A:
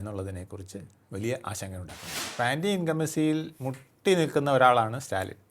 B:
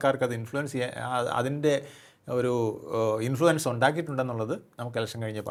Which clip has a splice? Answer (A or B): A